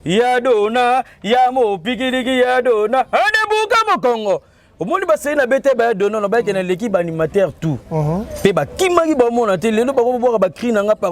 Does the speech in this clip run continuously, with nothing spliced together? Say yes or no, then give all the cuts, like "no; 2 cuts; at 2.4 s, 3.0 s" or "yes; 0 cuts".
yes; 0 cuts